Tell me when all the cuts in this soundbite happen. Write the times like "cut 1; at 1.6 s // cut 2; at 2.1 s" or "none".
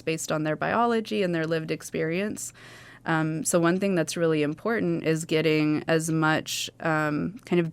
none